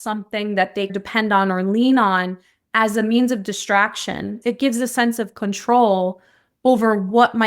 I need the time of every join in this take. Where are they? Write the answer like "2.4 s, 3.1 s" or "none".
0.9 s, 4.4 s